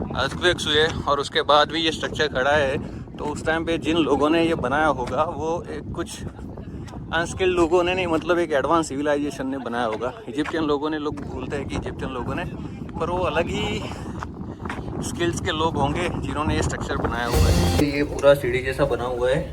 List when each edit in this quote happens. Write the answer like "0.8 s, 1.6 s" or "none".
17.8 s